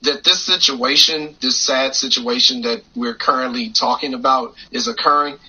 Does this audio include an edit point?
no; 0 cuts

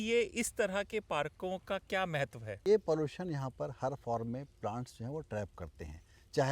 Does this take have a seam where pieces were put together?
yes; 1 cut; at 2.7 s

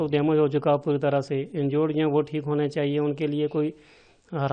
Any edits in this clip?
no; 0 cuts

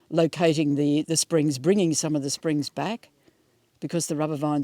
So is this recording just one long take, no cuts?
yes; 0 cuts

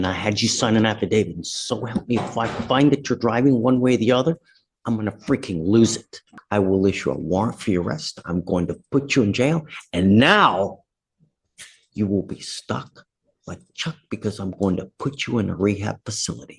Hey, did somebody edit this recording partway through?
yes; 1 cut; at 6.3 s

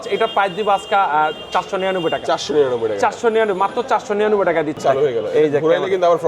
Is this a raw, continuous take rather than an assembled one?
no; 1 cut; at 4.8 s

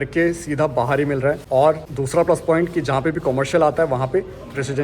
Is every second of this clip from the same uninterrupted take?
no; 1 cut; at 1.6 s

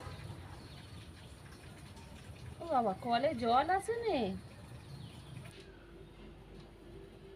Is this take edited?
yes; 1 cut; at 5.5 s

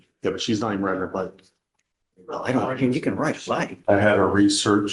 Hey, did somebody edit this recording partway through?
yes; 1 cut; at 3.7 s

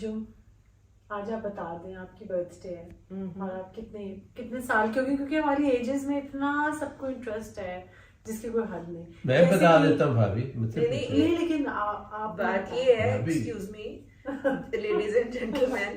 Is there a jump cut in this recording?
no; 0 cuts

